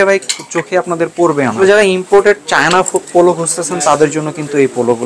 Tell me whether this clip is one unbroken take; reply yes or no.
no